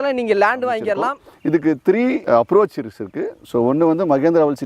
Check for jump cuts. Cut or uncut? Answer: cut